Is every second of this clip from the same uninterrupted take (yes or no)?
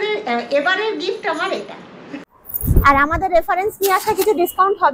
no